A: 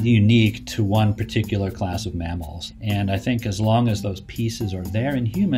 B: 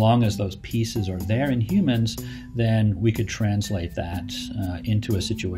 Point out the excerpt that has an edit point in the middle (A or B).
A